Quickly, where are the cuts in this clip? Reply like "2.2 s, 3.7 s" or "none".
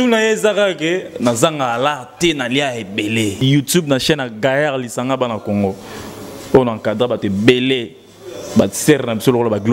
3.4 s